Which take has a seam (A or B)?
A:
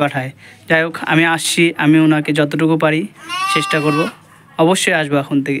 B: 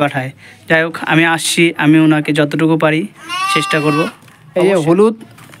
B